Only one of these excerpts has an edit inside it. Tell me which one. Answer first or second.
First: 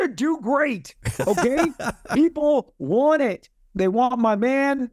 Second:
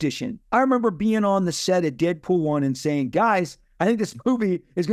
first